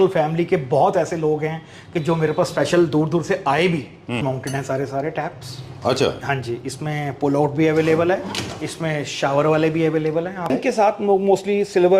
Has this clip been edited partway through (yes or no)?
yes